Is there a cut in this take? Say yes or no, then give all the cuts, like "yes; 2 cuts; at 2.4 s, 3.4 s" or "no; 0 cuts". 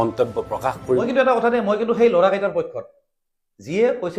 yes; 1 cut; at 1.0 s